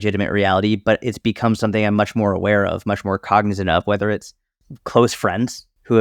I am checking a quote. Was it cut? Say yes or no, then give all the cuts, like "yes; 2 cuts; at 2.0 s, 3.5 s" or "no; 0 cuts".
no; 0 cuts